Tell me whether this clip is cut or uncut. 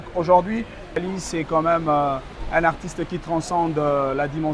cut